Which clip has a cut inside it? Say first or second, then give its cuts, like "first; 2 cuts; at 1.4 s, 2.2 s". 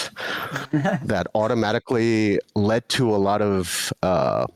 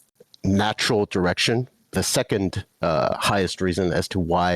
second; 1 cut; at 1.9 s